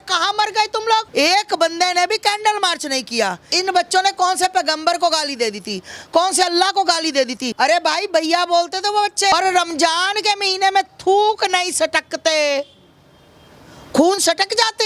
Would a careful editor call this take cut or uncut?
cut